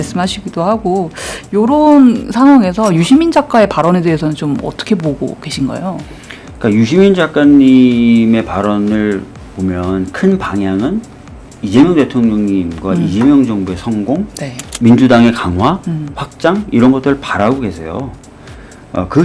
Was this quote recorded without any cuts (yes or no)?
yes